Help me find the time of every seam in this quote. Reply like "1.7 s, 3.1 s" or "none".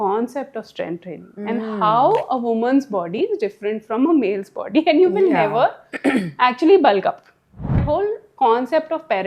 7.8 s